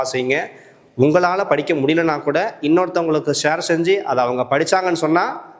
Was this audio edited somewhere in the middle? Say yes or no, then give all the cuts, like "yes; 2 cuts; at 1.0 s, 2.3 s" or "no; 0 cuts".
no; 0 cuts